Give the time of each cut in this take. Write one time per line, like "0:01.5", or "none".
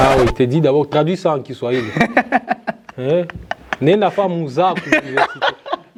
none